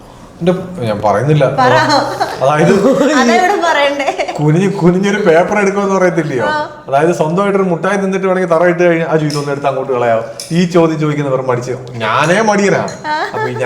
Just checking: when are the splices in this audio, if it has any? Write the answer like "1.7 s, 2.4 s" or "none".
none